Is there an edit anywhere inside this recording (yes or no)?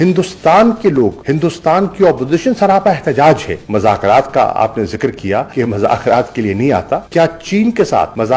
yes